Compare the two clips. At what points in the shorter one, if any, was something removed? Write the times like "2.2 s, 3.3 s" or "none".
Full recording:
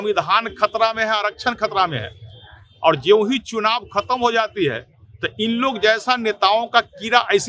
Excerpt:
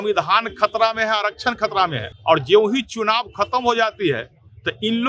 2.1 s